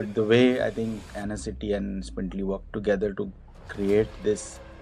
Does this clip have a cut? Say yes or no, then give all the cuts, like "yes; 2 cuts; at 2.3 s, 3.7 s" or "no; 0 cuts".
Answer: yes; 1 cut; at 1.0 s